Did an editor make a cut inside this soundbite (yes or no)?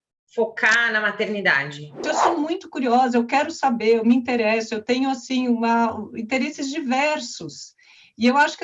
yes